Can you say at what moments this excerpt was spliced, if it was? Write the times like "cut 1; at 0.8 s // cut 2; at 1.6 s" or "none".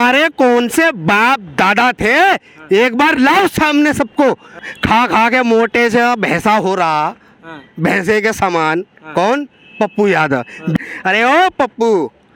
cut 1; at 4.6 s // cut 2; at 10.8 s